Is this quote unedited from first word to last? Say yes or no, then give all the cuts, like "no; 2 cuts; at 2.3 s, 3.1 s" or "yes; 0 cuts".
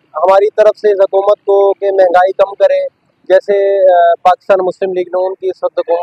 yes; 0 cuts